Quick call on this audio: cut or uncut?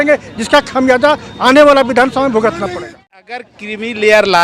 cut